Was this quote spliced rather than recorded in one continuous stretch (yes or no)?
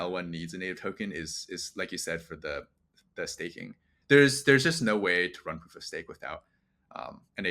yes